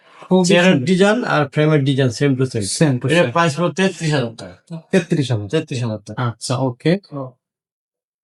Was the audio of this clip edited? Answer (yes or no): no